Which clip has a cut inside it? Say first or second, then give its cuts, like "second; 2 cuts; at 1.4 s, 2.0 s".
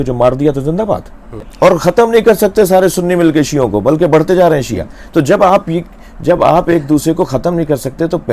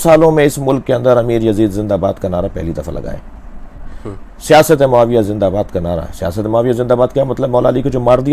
first; 1 cut; at 1.4 s